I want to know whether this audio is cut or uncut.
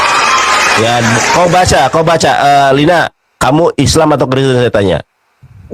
uncut